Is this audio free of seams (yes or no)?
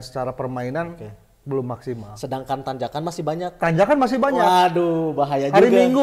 yes